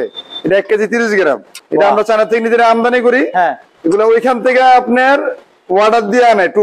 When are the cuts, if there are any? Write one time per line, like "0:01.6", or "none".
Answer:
0:01.5